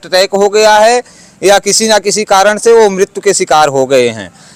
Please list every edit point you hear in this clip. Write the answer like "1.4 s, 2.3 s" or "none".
none